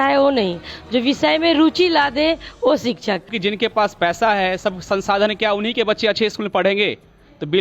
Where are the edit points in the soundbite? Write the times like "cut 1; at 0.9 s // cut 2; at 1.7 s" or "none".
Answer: cut 1; at 3.3 s

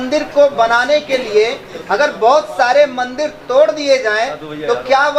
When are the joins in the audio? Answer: none

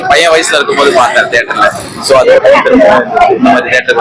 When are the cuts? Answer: none

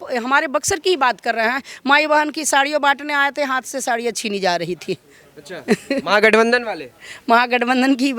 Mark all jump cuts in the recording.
none

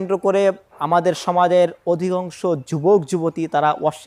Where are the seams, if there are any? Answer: none

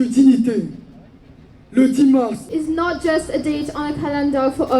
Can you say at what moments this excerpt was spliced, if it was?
cut 1; at 2.4 s

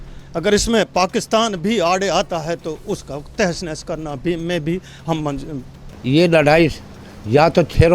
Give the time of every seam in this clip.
cut 1; at 5.9 s

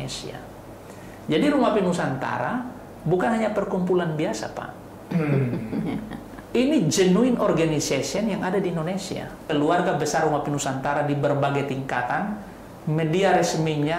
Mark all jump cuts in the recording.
cut 1; at 9.4 s

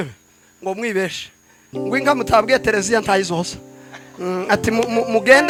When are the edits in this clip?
none

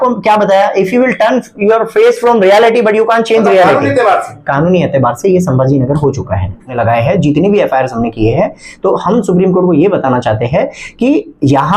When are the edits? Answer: cut 1; at 6.8 s

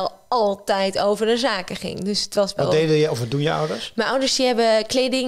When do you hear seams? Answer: none

